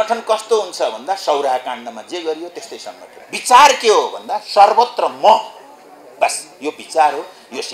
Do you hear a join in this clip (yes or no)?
yes